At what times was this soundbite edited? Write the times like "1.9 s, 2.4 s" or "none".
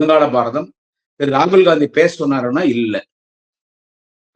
none